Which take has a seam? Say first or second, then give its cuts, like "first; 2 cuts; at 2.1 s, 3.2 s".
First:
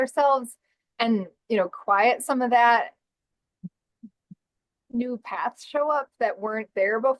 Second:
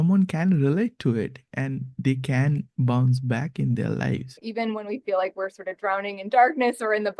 second; 1 cut; at 4.4 s